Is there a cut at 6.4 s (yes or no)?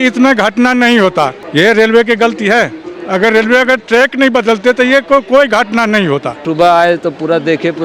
yes